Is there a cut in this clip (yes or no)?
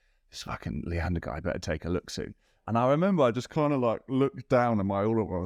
no